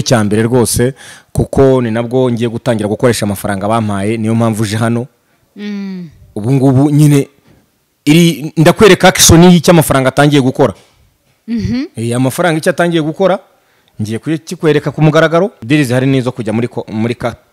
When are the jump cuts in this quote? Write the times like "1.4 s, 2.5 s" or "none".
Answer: 15.6 s